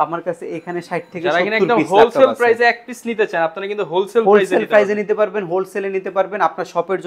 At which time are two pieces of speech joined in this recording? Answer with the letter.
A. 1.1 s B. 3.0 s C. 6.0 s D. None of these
D